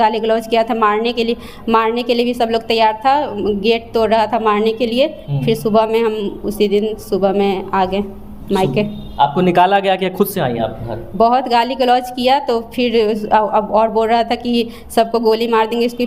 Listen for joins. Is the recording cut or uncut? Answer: uncut